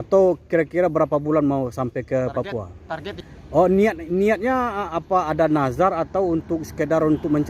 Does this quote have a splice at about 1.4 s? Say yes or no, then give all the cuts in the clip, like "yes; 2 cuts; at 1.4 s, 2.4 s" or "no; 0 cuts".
no; 1 cut; at 3.2 s